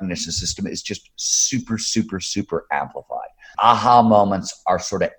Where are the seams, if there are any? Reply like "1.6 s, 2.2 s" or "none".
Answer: 3.5 s